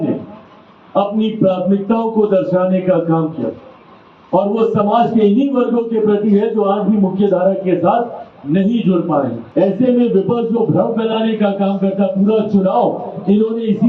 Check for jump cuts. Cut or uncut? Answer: cut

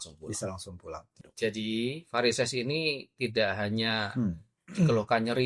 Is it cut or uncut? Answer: cut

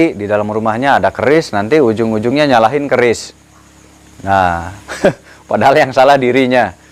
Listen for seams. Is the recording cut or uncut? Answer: uncut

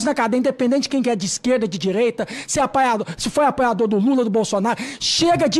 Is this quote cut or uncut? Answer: uncut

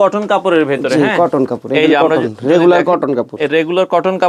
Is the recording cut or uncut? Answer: uncut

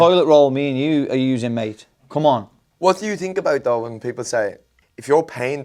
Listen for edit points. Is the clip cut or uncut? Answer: cut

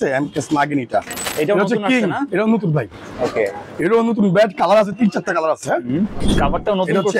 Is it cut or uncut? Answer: cut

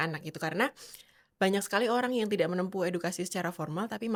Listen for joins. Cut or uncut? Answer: uncut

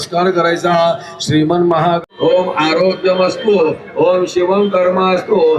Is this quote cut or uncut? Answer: cut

